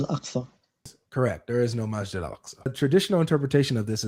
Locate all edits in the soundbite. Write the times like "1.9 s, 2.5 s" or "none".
1.0 s, 2.7 s